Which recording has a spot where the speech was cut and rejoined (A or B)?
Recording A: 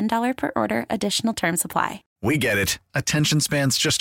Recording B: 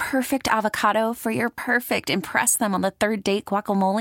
A